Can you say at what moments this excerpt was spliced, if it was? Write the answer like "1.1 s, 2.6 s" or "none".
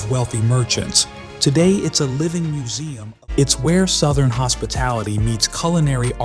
2.8 s